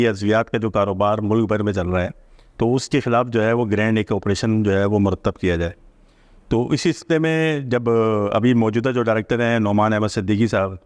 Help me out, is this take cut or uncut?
uncut